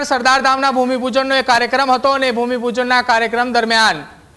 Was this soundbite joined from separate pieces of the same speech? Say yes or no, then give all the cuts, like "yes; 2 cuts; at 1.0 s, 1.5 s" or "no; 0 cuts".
no; 0 cuts